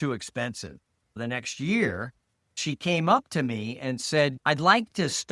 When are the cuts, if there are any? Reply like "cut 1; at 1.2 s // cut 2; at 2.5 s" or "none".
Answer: cut 1; at 1.2 s // cut 2; at 2.6 s